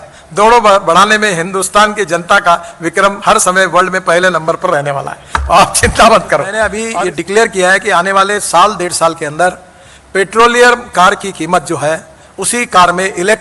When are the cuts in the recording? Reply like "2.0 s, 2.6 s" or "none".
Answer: 6.9 s